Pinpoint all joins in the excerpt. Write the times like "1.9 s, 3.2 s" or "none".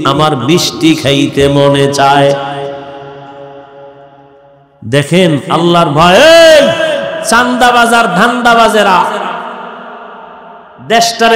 none

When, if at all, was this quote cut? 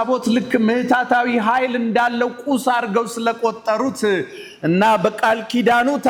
none

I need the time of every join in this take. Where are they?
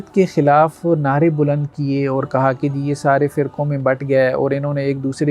none

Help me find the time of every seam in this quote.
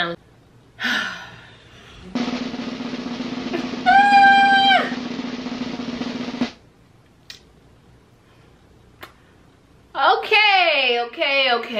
none

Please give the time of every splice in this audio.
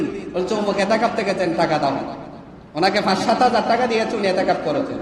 none

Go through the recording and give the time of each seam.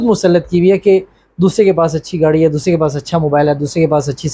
none

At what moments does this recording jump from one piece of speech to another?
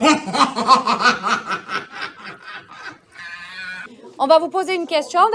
4.1 s

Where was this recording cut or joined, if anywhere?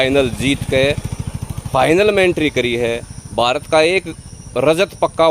none

